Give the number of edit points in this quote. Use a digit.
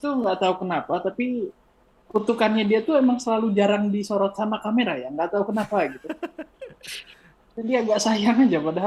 0